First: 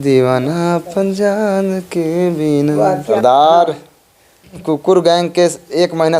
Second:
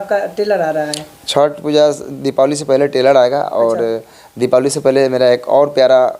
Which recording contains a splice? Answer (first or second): first